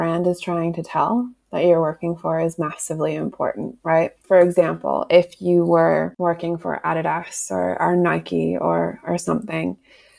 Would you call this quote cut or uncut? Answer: cut